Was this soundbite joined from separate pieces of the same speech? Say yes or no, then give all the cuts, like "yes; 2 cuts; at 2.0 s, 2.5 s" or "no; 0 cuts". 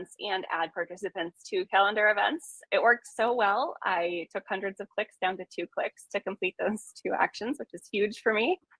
yes; 1 cut; at 2.5 s